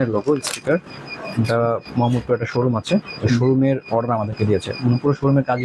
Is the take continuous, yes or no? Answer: yes